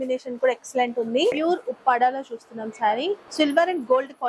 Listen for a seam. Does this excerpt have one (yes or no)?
yes